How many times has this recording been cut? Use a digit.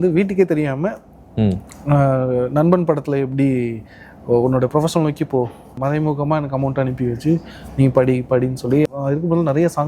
2